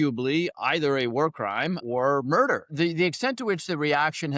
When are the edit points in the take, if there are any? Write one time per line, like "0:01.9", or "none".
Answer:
0:01.8
0:02.7